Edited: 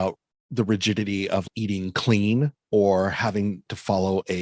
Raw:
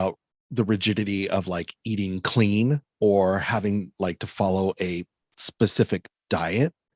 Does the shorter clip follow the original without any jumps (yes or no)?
no